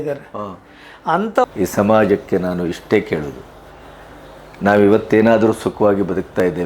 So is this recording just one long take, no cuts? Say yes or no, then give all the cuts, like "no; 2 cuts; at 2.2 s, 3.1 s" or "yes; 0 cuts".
no; 1 cut; at 1.4 s